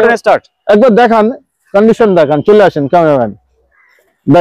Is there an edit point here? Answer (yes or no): no